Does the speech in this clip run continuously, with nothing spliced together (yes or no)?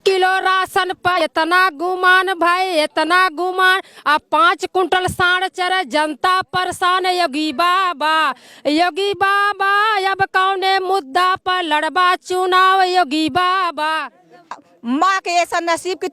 no